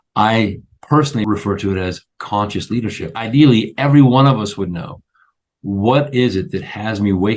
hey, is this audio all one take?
no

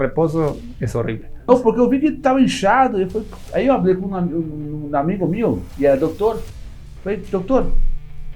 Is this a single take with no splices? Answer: no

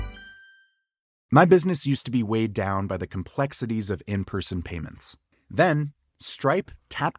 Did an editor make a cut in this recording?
yes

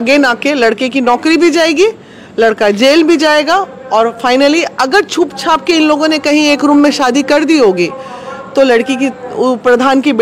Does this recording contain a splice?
no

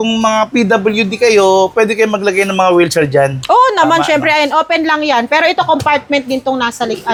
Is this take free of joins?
yes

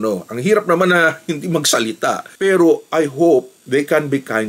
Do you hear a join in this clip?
yes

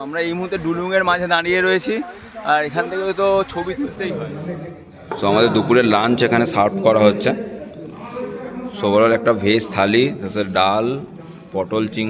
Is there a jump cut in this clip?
yes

